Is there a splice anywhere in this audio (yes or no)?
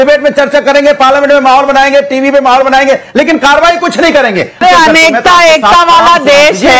yes